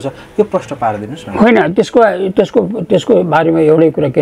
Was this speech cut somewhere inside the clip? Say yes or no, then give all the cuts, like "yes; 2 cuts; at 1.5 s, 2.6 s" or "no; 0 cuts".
no; 0 cuts